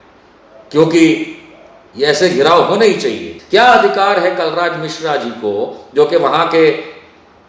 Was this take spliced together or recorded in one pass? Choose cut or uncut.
cut